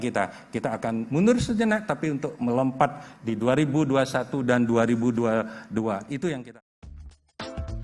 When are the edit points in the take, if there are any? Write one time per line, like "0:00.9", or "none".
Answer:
0:06.5